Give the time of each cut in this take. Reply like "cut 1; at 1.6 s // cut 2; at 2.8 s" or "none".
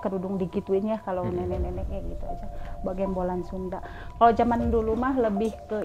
none